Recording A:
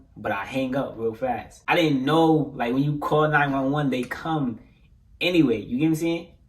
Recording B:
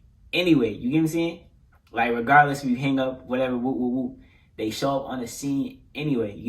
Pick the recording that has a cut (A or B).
A